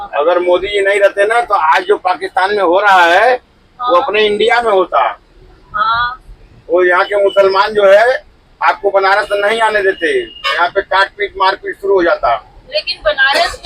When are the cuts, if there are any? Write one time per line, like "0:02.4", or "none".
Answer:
none